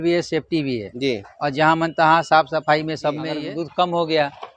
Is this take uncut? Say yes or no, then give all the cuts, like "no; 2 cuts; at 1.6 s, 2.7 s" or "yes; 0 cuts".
no; 1 cut; at 3.3 s